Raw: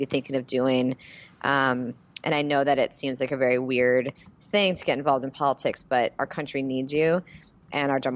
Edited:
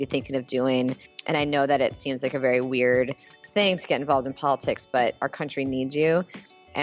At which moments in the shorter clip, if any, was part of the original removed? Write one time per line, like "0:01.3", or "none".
0:01.1